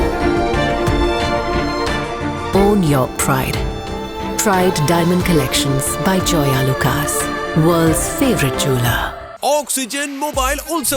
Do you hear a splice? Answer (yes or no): no